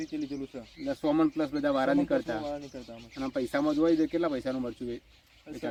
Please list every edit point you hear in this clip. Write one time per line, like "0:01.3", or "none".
none